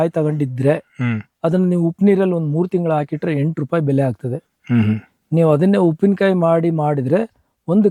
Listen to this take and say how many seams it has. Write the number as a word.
zero